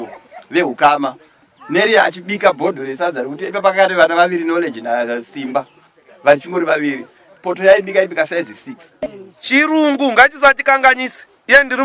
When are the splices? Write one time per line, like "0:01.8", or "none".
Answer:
0:08.9